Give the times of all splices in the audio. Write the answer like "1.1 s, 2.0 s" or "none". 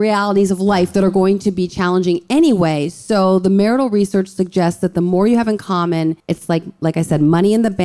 6.3 s

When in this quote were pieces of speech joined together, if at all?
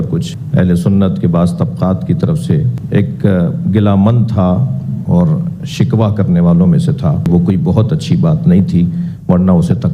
7.3 s

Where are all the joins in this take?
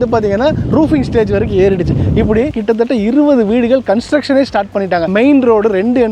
2.5 s, 5.1 s

